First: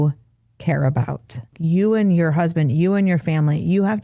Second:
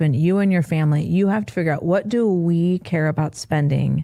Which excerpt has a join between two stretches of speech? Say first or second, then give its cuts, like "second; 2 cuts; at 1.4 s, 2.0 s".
first; 1 cut; at 1.5 s